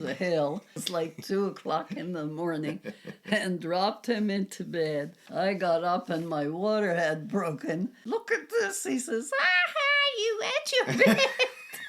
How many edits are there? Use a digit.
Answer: 3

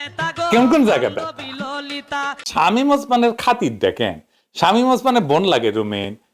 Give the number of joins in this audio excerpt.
1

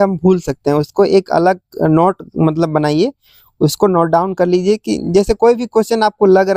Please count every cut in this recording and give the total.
0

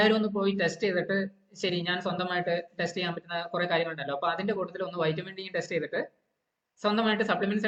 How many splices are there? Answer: 0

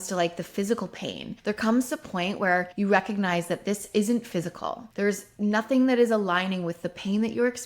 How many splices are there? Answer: 3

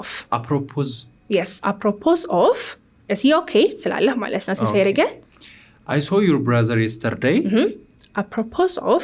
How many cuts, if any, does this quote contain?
0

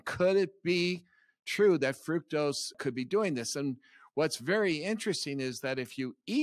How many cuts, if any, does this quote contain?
1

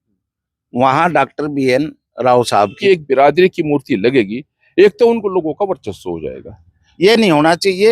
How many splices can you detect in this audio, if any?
2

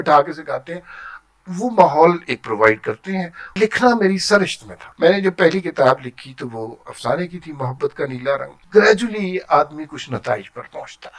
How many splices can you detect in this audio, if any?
3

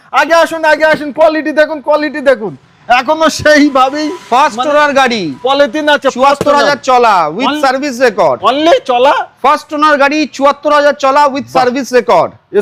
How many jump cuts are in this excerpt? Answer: 0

